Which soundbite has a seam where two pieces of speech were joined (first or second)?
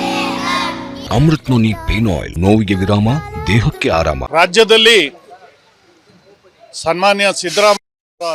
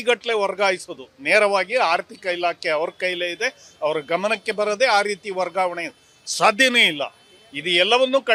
first